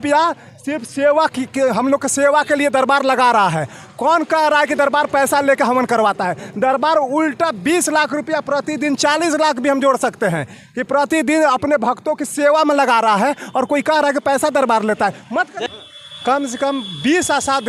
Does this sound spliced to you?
yes; 1 cut; at 15.7 s

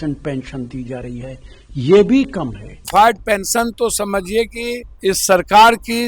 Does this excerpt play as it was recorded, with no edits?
no; 2 cuts; at 2.8 s, 4.9 s

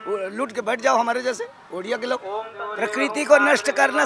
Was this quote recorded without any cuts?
no; 1 cut; at 2.5 s

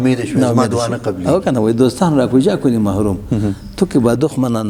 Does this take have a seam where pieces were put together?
no; 0 cuts

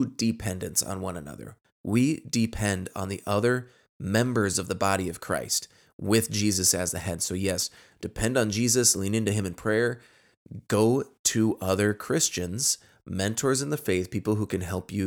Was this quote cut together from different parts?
no; 0 cuts

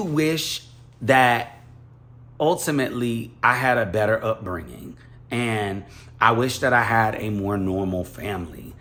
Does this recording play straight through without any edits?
yes; 0 cuts

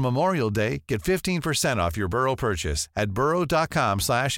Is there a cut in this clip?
no; 0 cuts

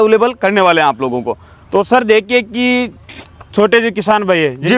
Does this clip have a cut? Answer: no; 0 cuts

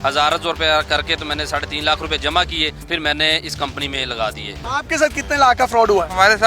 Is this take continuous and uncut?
no; 2 cuts; at 2.9 s, 4.6 s

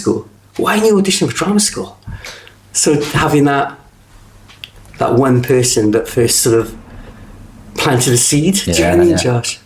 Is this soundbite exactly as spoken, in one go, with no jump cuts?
yes; 0 cuts

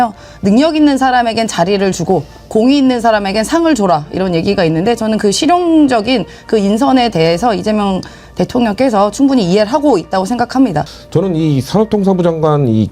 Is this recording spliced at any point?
yes; 1 cut; at 10.9 s

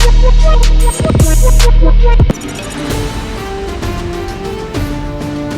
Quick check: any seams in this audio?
no; 0 cuts

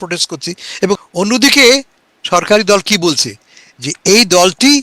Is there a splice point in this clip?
yes; 1 cut; at 1.0 s

